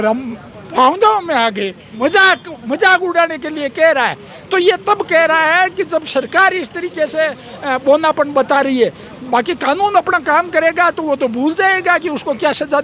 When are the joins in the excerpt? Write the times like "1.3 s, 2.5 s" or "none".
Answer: 1.9 s